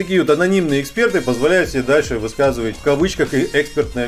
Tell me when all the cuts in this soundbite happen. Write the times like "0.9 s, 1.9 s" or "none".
2.7 s